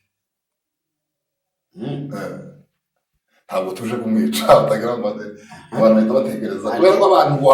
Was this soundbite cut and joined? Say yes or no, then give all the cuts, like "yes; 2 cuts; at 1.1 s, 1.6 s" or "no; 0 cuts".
no; 0 cuts